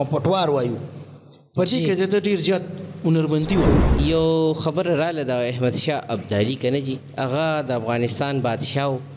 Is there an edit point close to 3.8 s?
yes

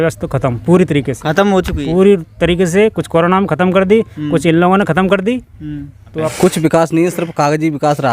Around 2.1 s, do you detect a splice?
no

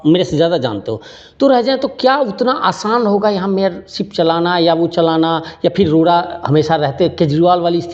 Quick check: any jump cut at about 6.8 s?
no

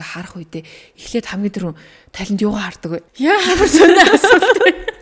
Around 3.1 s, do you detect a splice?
yes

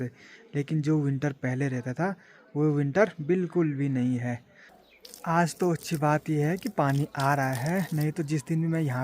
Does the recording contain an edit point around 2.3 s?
no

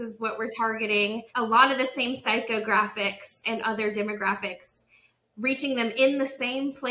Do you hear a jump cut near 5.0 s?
no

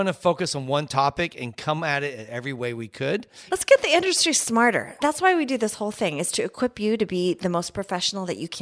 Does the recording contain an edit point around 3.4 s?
yes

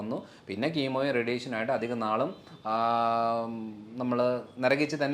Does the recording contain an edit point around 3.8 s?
no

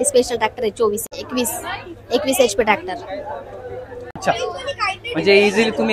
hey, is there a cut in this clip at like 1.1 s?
yes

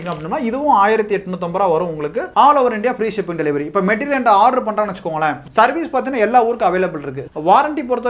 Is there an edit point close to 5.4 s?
no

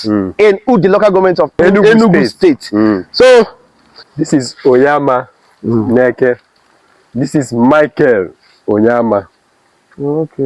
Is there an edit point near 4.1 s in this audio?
yes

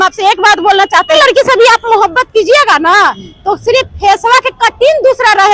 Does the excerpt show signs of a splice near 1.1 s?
yes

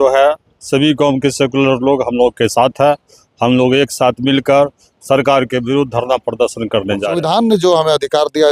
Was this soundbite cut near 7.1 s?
yes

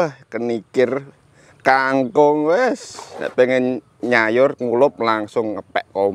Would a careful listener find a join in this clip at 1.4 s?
no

